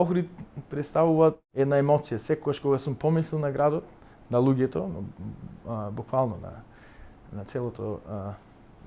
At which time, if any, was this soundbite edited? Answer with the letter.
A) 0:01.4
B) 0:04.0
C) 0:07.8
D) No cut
A